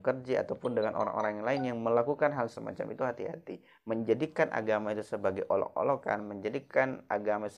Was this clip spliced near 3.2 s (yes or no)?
no